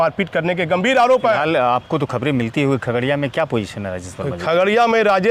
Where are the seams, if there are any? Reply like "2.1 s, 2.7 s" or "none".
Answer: 1.4 s